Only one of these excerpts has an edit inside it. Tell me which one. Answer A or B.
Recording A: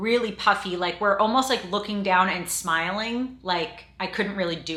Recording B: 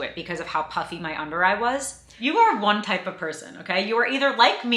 B